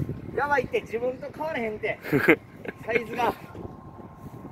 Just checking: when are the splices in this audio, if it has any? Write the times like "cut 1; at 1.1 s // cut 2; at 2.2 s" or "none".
none

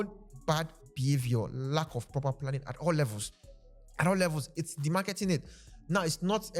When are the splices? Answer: none

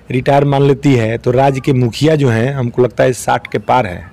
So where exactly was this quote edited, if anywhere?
none

